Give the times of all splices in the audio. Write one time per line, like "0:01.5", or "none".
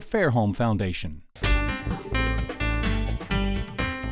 0:01.3

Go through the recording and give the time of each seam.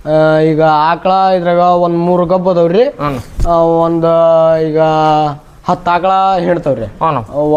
none

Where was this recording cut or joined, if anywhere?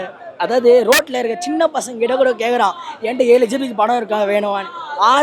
none

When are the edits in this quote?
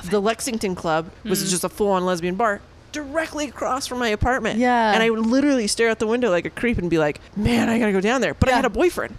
0:01.1
0:07.3

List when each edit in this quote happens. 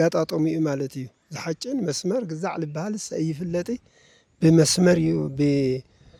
none

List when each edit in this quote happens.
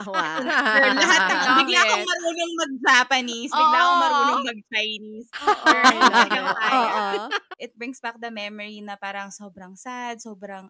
0:07.4

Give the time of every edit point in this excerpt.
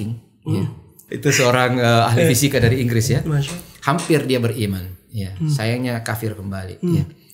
0:01.0

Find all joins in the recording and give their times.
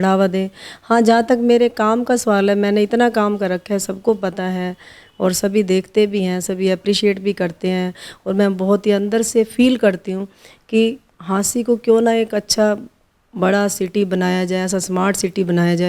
0:08.1

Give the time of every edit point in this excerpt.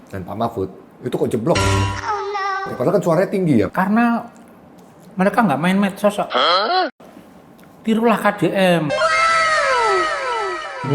0:03.7

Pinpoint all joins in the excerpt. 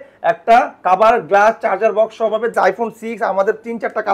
0:02.5

